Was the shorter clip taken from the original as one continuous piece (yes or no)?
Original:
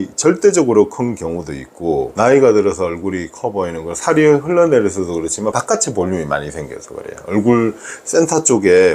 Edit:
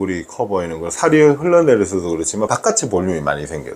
yes